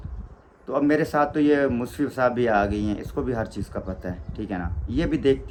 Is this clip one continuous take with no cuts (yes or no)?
yes